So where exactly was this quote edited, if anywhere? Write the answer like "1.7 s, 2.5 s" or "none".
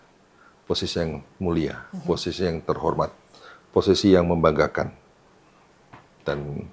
none